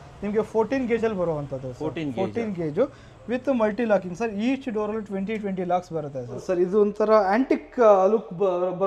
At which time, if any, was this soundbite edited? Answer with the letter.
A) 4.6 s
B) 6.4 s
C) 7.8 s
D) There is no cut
B